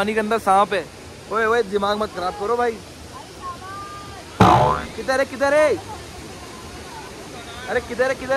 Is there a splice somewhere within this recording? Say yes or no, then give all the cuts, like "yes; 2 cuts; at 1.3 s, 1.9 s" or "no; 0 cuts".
no; 0 cuts